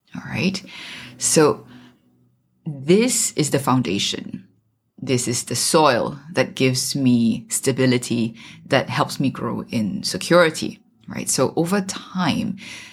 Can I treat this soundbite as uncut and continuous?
yes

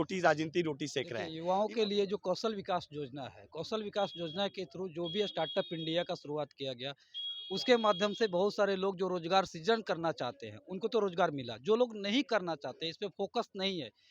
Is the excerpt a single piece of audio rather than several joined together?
no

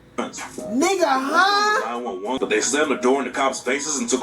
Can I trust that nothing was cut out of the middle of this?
no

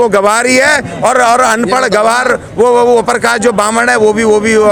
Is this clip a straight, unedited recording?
yes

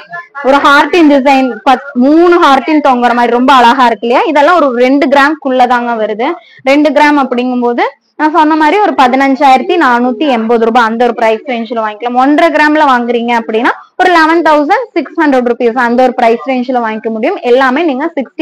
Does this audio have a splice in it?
no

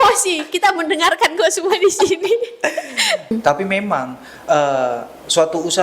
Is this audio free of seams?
no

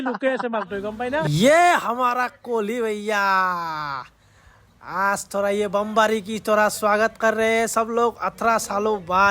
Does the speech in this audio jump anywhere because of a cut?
yes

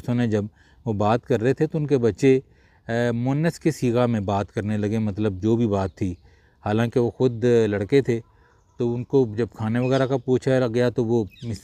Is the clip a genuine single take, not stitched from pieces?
yes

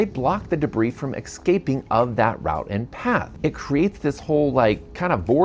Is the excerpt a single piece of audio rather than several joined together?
yes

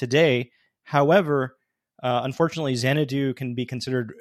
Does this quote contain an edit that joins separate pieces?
no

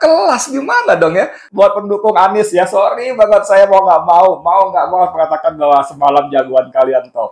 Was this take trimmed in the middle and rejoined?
yes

